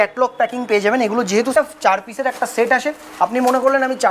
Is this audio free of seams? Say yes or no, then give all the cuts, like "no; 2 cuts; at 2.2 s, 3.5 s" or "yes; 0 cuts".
no; 1 cut; at 1.5 s